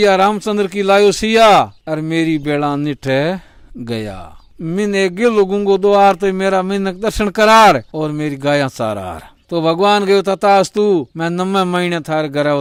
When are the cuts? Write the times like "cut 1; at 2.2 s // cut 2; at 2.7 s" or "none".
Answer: none